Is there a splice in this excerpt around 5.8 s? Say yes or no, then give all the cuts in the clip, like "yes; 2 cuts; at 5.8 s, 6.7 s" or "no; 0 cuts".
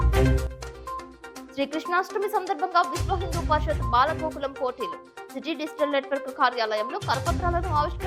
no; 1 cut; at 0.9 s